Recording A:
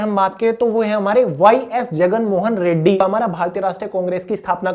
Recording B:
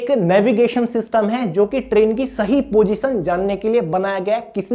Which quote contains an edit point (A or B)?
A